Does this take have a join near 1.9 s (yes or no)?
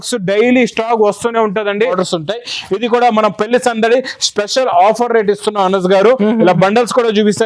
yes